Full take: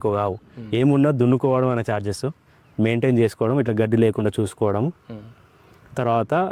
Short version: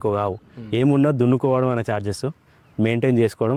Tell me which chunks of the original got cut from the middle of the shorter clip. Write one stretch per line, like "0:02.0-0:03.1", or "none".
none